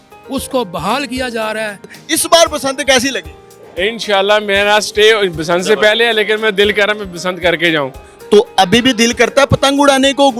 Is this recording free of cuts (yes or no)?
no